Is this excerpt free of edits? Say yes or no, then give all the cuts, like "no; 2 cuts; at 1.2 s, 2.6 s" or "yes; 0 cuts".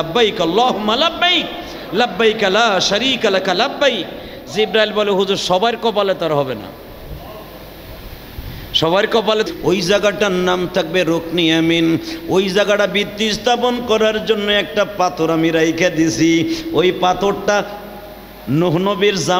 no; 1 cut; at 9.5 s